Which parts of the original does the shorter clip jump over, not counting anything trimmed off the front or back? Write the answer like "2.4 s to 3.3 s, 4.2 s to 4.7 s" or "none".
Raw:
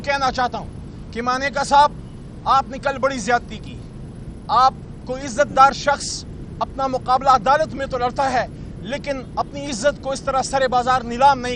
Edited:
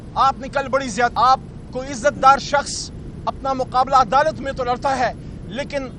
3.4 s to 4.5 s